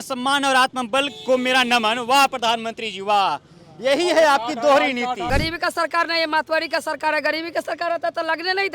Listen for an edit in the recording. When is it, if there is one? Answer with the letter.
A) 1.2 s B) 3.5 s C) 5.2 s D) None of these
C